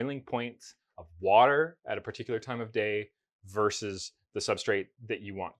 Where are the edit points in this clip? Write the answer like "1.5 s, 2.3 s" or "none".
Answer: none